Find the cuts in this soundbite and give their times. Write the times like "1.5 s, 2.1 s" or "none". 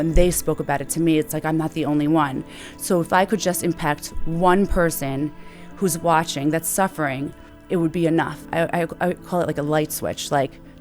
7.5 s, 8.4 s